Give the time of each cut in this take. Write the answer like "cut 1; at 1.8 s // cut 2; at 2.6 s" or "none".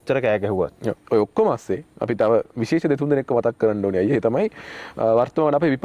cut 1; at 1.0 s